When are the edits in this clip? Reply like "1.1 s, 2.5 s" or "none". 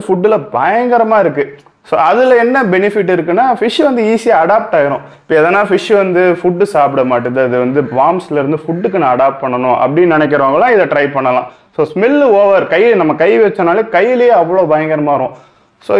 none